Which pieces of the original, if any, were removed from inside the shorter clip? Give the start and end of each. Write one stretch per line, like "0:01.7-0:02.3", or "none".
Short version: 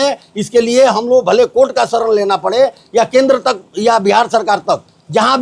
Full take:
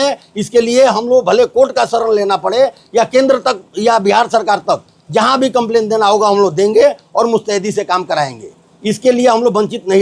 none

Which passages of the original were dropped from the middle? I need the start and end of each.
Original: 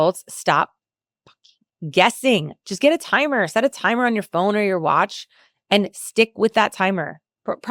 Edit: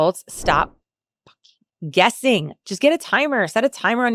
none

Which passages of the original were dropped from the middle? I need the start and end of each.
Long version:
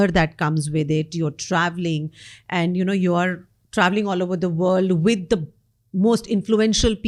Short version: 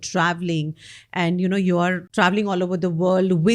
0:03.4-0:03.6

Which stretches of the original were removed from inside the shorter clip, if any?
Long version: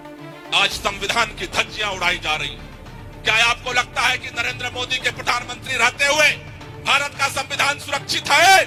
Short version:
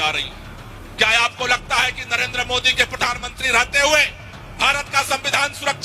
none

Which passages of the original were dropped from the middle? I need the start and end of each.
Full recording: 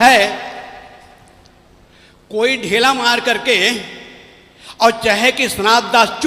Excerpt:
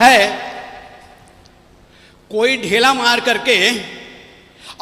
none

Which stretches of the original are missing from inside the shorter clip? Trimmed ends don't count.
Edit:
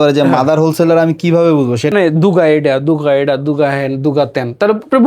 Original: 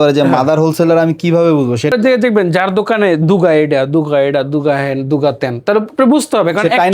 0:01.9-0:03.0

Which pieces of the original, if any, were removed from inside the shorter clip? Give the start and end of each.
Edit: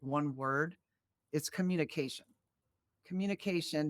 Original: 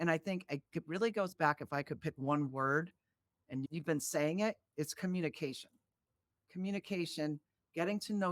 0:03.4-0:04.7

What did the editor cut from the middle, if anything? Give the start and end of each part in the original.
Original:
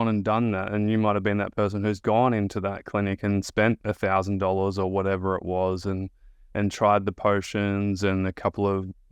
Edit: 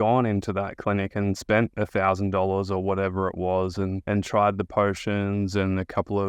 0:06.1-0:06.5

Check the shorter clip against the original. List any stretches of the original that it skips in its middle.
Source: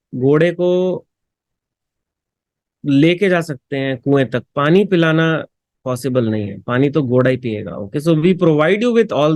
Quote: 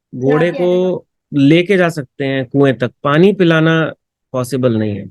0:01.1-0:02.7

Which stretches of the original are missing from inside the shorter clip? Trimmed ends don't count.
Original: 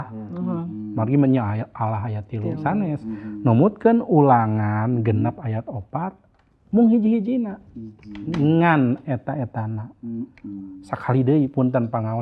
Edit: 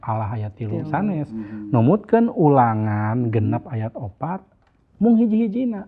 none

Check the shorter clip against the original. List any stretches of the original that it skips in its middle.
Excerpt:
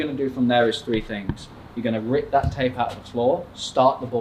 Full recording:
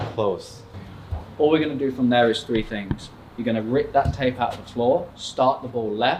none

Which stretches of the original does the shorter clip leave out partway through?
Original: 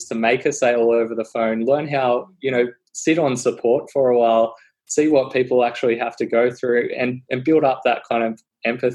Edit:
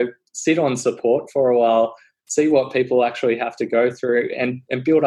none

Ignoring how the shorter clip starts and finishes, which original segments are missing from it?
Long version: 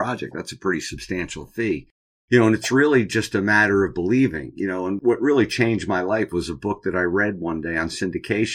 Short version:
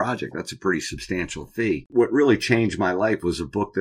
0:01.9-0:05.0

